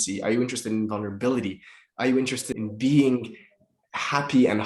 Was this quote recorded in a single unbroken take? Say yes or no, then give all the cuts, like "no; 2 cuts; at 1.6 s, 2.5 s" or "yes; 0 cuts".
no; 1 cut; at 2.5 s